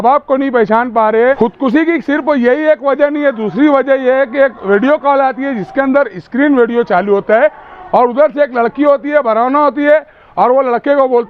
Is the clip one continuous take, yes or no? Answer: no